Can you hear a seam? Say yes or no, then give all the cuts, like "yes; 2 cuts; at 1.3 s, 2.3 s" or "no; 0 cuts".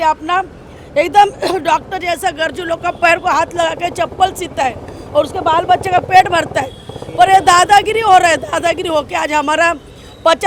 no; 0 cuts